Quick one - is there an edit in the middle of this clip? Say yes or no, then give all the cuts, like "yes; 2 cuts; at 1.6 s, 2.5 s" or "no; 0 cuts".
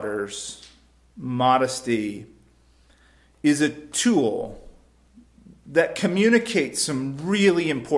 no; 0 cuts